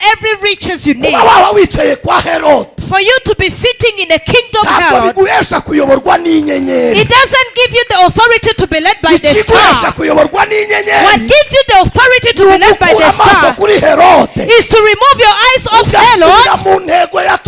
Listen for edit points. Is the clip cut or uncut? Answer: uncut